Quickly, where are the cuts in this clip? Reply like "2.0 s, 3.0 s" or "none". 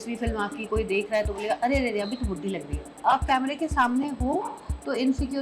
3.0 s